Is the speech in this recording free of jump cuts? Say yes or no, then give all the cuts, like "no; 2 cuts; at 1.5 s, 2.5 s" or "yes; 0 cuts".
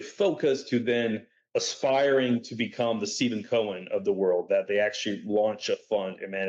yes; 0 cuts